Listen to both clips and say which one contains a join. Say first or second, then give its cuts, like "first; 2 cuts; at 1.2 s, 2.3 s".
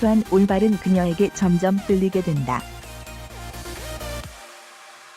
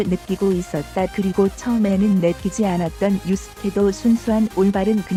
first; 1 cut; at 2.6 s